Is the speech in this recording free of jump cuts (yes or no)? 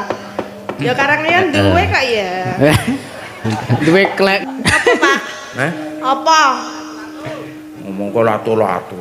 no